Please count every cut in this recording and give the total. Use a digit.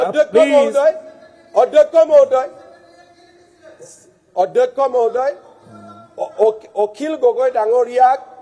0